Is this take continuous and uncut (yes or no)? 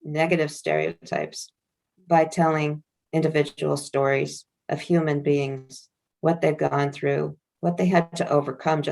no